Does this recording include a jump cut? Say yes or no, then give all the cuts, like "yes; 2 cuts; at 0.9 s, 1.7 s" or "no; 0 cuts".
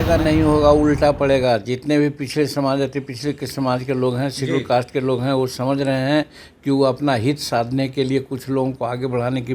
no; 0 cuts